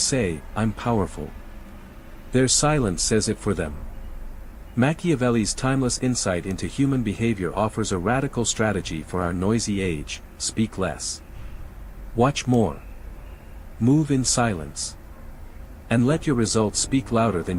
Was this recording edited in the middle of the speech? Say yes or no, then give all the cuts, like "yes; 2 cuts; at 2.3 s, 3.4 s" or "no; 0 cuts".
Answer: no; 0 cuts